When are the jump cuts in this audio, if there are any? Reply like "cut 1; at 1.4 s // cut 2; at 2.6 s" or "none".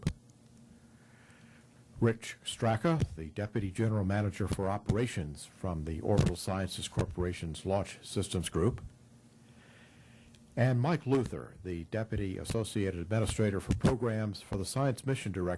none

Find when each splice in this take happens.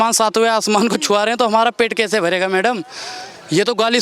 none

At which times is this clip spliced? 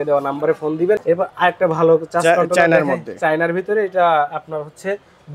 cut 1; at 1.0 s

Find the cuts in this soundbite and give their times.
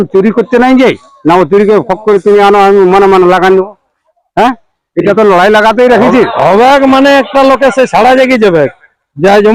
none

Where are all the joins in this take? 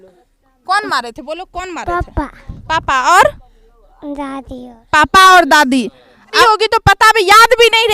cut 1; at 6.3 s

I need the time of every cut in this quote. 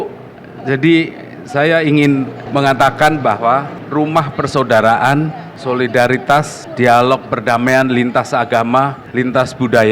cut 1; at 2.4 s // cut 2; at 3.8 s // cut 3; at 5.5 s // cut 4; at 6.6 s // cut 5; at 9.0 s

